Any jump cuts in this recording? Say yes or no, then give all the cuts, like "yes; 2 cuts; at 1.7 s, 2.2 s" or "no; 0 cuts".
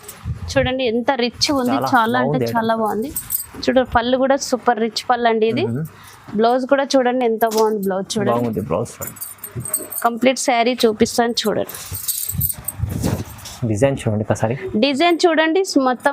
no; 0 cuts